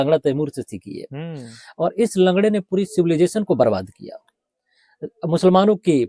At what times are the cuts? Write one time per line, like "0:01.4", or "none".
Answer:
none